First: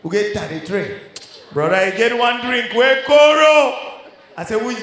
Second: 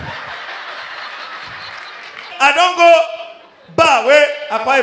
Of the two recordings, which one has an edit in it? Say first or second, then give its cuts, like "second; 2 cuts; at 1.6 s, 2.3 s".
second; 1 cut; at 2.3 s